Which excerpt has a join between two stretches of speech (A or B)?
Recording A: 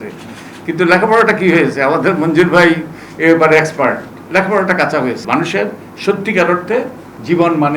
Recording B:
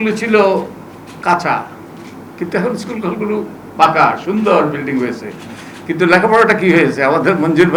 A